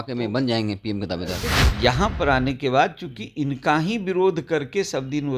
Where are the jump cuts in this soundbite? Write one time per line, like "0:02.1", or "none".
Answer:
0:01.5